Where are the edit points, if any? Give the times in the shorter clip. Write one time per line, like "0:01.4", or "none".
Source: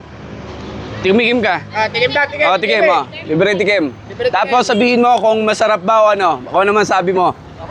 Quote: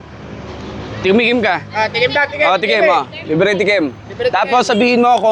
none